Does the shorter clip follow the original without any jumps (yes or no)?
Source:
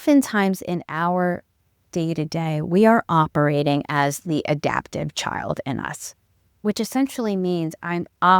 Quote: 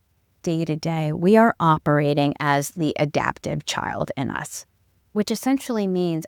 yes